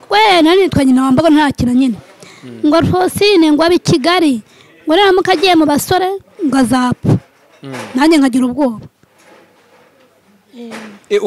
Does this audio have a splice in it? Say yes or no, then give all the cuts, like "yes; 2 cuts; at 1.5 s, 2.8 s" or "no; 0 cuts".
no; 0 cuts